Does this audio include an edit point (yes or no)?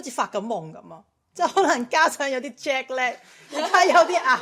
no